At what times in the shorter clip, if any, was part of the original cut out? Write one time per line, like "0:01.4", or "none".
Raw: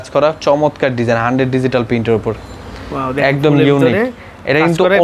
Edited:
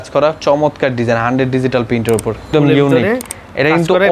0:02.5

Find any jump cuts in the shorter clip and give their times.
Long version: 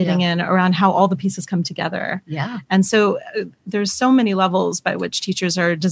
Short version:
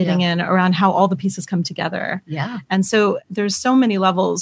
0:03.3

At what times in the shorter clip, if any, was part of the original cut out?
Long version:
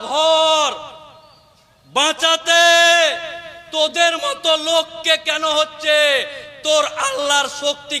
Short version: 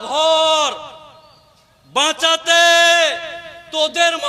none

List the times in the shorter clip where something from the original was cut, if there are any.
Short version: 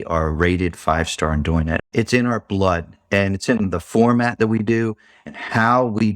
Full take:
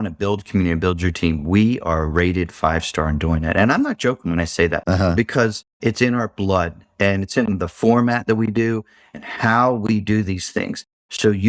0:01.7

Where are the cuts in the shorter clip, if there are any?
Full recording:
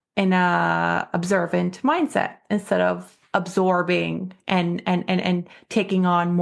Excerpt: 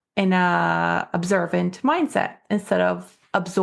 none

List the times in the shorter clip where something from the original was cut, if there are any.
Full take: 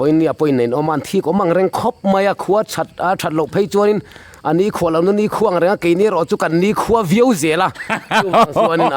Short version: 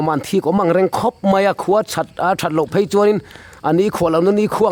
none

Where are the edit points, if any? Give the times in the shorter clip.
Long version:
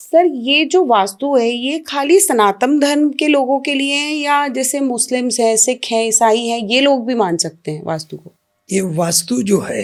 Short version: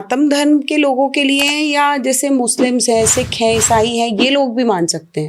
none

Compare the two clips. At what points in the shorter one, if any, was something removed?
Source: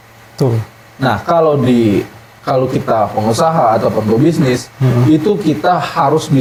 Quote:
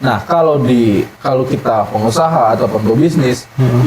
0:01.1

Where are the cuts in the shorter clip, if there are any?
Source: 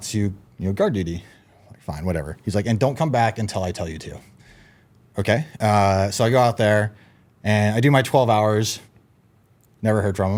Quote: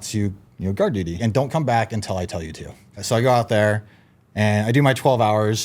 0:01.2
0:03.0

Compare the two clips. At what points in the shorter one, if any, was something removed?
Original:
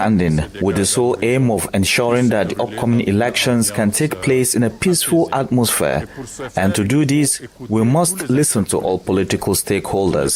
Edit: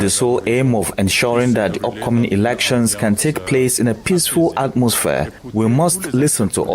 0:05.4

